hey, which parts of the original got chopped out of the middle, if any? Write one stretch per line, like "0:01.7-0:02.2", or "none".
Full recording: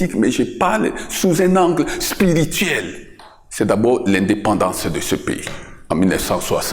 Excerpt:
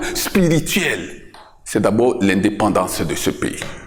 none